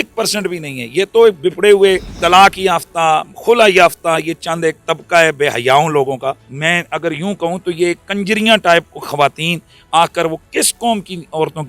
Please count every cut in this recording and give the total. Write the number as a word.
two